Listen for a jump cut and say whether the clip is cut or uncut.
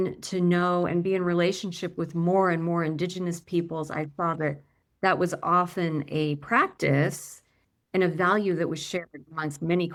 uncut